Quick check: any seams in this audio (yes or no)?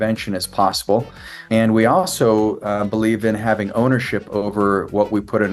yes